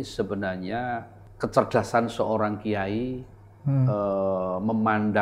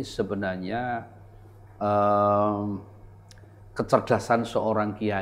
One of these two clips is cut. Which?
first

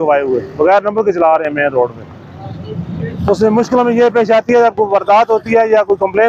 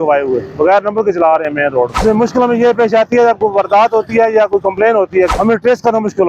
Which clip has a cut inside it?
second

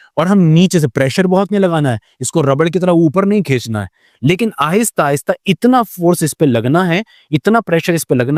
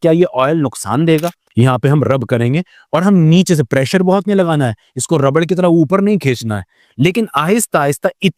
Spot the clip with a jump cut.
second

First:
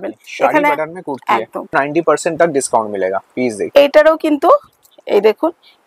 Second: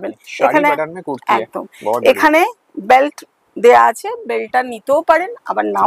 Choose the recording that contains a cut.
first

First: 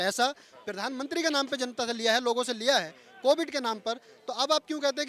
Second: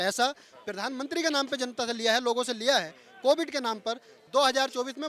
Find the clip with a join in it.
second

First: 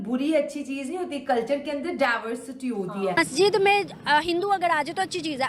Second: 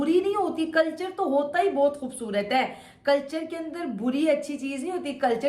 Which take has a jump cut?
first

